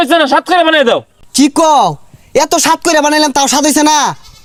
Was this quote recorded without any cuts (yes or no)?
yes